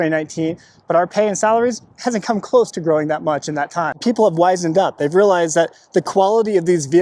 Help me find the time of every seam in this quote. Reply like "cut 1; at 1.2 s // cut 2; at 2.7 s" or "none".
cut 1; at 4.0 s

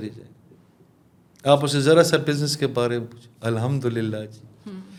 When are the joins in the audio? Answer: none

